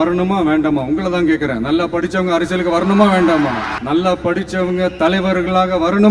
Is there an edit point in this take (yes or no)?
yes